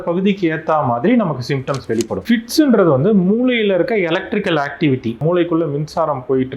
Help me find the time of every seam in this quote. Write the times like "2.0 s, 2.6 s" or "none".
2.2 s